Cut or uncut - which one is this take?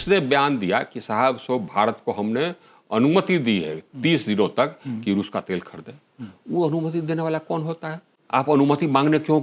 cut